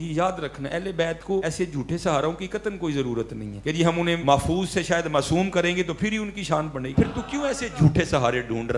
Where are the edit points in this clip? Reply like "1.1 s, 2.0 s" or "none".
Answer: 1.4 s, 3.5 s, 4.2 s, 6.9 s